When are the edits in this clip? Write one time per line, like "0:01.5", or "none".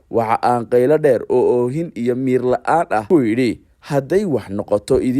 0:03.2